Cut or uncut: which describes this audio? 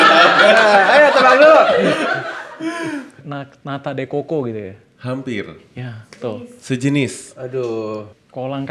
uncut